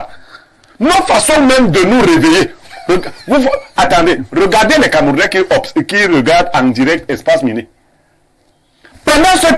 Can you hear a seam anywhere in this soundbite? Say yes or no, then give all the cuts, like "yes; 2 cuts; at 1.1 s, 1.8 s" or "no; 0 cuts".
no; 0 cuts